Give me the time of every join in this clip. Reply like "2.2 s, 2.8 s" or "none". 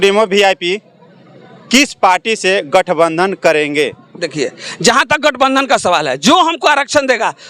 none